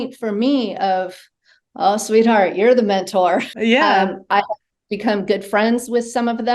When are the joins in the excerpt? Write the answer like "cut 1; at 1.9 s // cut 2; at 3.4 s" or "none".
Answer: cut 1; at 3.5 s